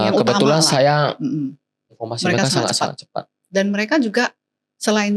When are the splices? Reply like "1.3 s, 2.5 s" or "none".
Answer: 2.0 s